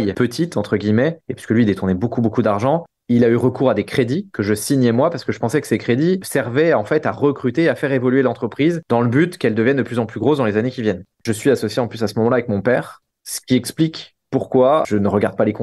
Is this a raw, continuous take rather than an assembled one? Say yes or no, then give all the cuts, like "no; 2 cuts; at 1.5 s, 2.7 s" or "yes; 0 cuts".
no; 1 cut; at 11.2 s